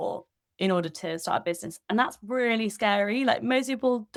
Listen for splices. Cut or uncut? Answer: uncut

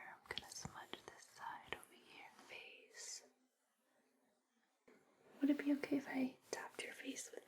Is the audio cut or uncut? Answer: cut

